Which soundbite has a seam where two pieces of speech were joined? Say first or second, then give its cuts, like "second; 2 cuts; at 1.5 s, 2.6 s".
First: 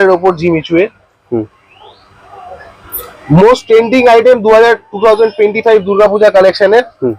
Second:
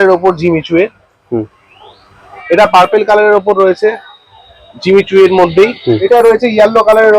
second; 2 cuts; at 2.3 s, 6.0 s